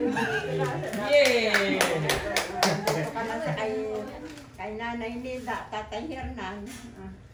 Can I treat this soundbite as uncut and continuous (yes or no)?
yes